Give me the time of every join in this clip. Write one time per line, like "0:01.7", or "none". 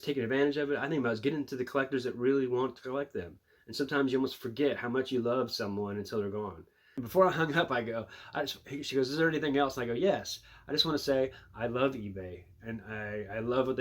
0:06.9